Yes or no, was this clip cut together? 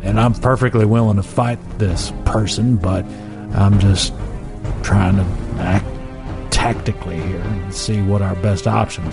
no